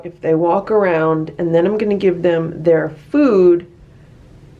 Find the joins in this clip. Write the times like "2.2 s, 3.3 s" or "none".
none